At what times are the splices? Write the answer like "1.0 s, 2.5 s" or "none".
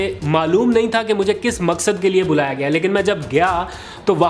none